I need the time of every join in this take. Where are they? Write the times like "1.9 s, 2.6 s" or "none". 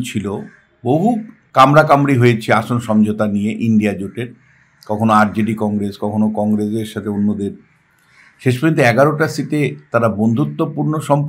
1.4 s